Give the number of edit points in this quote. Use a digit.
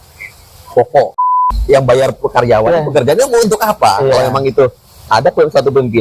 1